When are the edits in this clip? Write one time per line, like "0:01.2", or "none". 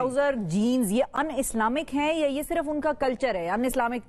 none